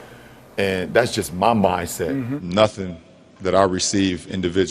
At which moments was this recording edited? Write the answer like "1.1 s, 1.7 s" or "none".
2.4 s